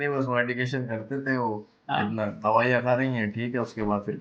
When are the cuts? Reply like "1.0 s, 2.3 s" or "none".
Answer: none